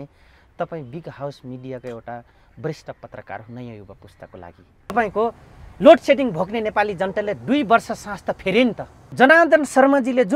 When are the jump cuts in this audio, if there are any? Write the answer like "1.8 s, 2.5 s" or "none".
4.9 s, 9.0 s